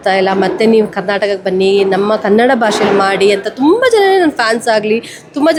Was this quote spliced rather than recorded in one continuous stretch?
no; 0 cuts

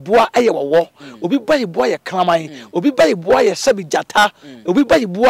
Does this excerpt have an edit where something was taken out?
no; 0 cuts

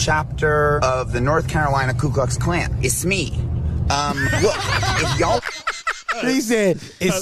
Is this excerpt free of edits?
no; 3 cuts; at 0.8 s, 2.7 s, 6.2 s

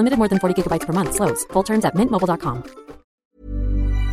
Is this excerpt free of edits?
no; 1 cut; at 3.2 s

